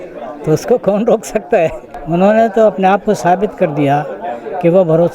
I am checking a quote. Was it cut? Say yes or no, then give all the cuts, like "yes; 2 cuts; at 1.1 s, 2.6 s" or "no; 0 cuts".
yes; 1 cut; at 2.0 s